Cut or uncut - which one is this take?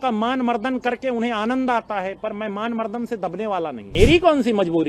cut